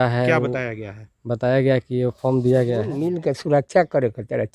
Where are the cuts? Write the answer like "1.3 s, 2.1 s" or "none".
3.1 s